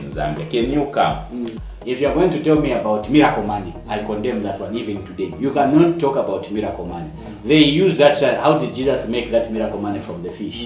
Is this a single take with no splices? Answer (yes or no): no